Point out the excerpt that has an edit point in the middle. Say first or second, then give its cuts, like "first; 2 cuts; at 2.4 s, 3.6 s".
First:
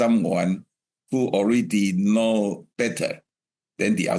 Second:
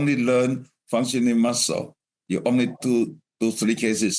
first; 1 cut; at 2.7 s